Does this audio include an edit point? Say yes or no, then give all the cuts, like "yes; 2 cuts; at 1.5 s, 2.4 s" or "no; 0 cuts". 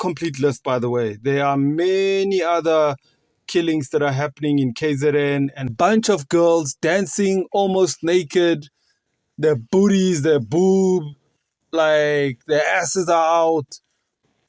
yes; 1 cut; at 5.6 s